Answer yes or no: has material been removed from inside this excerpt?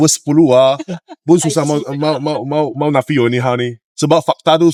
no